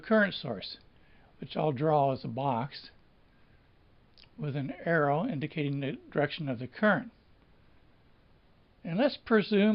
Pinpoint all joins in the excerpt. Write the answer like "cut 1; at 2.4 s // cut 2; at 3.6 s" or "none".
cut 1; at 6.3 s

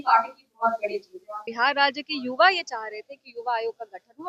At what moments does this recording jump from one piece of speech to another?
cut 1; at 1.3 s

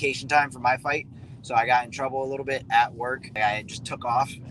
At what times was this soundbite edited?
cut 1; at 3.2 s

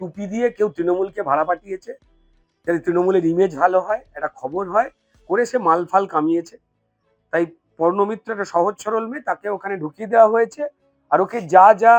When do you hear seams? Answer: none

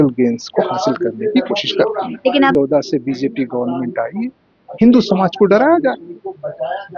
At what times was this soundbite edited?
cut 1; at 2.5 s

